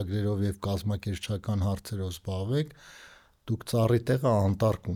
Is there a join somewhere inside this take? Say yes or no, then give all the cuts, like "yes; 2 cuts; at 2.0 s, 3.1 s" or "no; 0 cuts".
no; 0 cuts